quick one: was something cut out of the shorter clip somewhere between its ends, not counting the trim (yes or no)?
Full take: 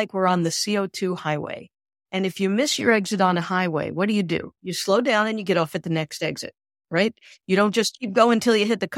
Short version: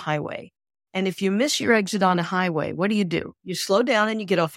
no